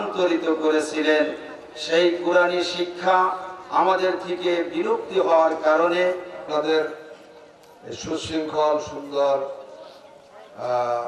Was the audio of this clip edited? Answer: yes; 1 cut; at 6.5 s

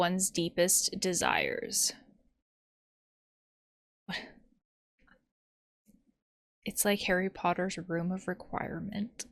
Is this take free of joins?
yes; 0 cuts

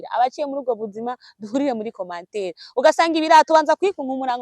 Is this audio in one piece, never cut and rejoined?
yes; 0 cuts

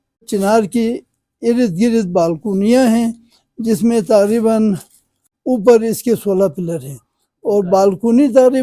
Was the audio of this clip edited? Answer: no; 0 cuts

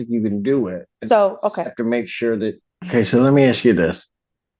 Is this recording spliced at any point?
yes; 1 cut; at 2.7 s

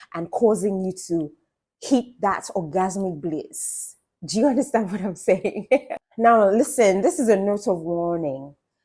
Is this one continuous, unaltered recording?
yes; 0 cuts

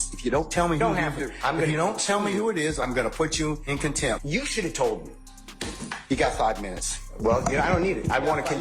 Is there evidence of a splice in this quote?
yes; 1 cut; at 4.2 s

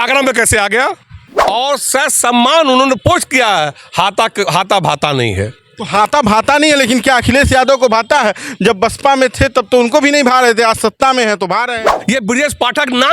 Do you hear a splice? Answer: yes; 2 cuts; at 1.2 s, 11.9 s

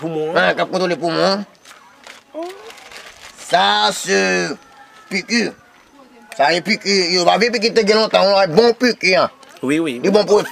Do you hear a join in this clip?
no; 0 cuts

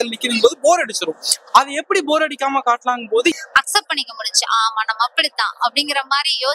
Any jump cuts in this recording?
yes; 1 cut; at 3.3 s

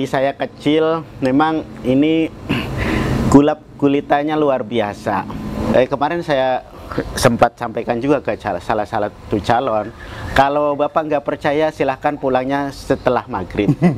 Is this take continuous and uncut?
no; 1 cut; at 5.7 s

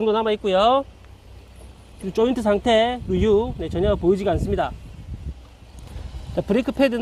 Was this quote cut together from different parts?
no; 0 cuts

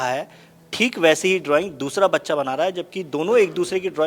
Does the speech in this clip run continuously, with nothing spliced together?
yes; 0 cuts

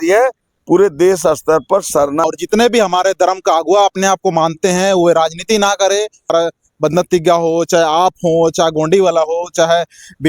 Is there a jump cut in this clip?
yes; 2 cuts; at 2.2 s, 6.3 s

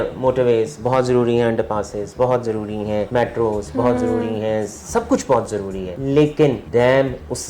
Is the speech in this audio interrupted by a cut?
yes; 3 cuts; at 3.1 s, 5.9 s, 6.6 s

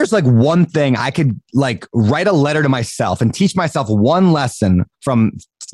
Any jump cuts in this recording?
no; 0 cuts

